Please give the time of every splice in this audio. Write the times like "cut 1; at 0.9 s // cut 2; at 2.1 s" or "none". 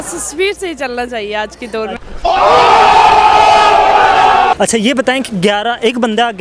none